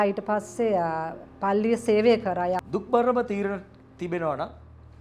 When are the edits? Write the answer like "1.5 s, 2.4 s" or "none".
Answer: 2.6 s